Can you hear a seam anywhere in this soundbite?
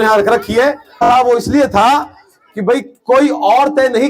yes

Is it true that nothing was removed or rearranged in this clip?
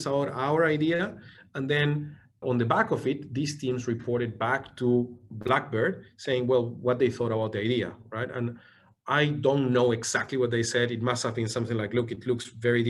yes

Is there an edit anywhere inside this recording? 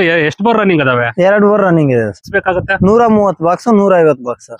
yes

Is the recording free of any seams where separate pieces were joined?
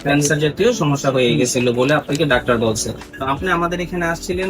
no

